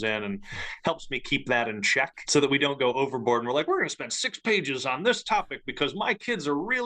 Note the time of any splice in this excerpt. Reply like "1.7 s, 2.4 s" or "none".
2.2 s